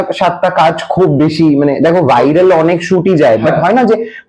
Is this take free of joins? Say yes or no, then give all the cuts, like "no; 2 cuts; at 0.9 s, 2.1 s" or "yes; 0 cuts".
yes; 0 cuts